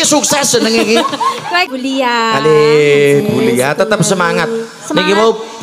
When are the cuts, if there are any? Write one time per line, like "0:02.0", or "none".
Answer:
0:01.7